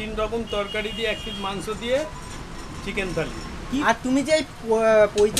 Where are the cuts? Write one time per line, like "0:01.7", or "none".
0:03.8